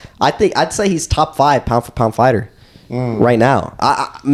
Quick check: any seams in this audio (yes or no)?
no